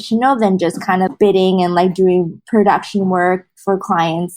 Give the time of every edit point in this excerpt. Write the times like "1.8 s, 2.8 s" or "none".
1.1 s, 2.4 s